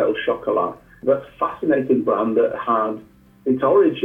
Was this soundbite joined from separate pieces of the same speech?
yes; 1 cut; at 0.9 s

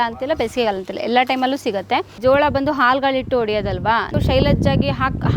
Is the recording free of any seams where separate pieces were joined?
no; 2 cuts; at 2.1 s, 4.1 s

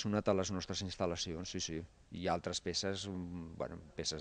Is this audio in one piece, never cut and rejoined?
yes; 0 cuts

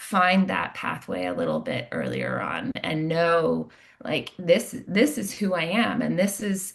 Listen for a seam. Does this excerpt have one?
no; 0 cuts

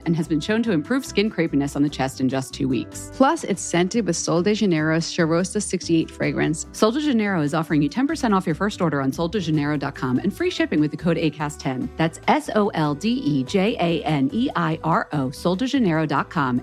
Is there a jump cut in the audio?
no; 0 cuts

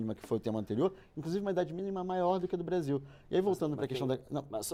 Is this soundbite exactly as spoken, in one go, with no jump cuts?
yes; 0 cuts

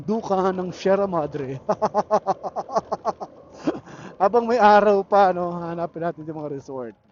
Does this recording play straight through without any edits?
yes; 0 cuts

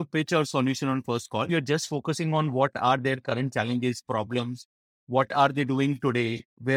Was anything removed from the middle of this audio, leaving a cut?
yes; 1 cut; at 1.5 s

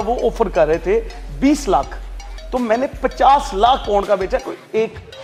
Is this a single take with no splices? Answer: yes; 0 cuts

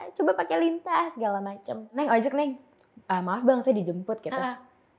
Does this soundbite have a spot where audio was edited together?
yes; 1 cut; at 2.0 s

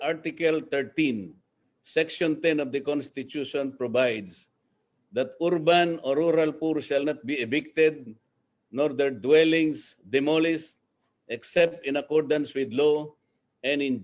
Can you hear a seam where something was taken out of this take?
no; 0 cuts

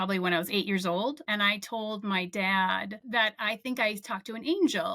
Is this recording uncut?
no; 2 cuts; at 1.2 s, 3.0 s

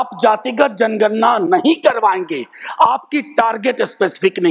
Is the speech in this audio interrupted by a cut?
no; 0 cuts

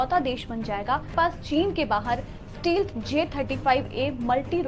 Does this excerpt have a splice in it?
no; 0 cuts

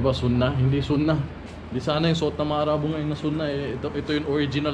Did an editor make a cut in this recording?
no; 0 cuts

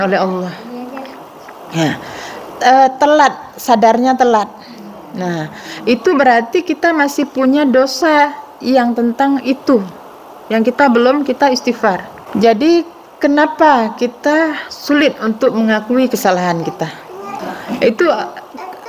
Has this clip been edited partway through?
yes; 2 cuts; at 12.1 s, 17.5 s

